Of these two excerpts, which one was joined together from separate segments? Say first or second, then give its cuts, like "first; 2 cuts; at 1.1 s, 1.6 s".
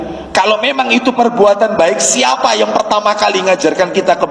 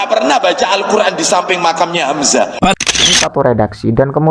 second; 1 cut; at 3.2 s